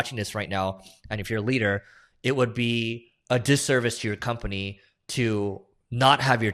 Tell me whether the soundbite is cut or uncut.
uncut